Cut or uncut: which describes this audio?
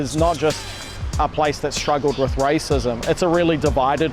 uncut